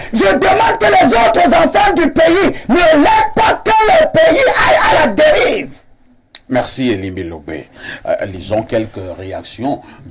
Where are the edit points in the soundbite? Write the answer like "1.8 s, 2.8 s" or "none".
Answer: none